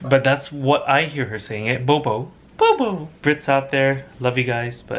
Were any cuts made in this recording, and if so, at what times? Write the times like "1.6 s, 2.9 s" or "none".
3.1 s